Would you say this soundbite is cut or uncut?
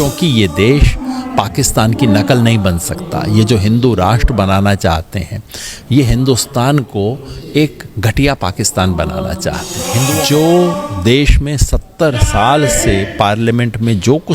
cut